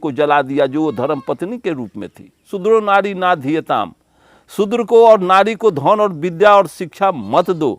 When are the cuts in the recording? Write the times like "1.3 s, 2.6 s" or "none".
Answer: 2.5 s